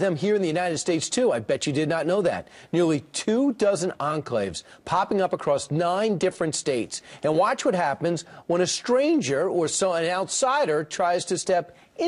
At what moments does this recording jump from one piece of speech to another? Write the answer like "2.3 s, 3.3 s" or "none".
none